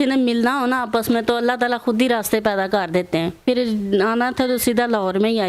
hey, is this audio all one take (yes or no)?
no